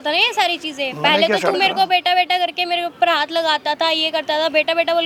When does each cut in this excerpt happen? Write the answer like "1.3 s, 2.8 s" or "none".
none